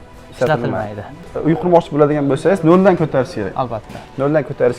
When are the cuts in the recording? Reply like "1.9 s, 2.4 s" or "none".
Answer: 1.3 s